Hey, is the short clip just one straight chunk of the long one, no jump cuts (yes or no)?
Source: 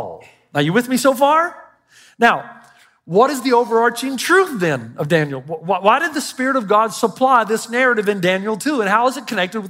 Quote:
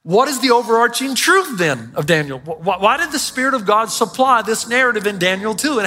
yes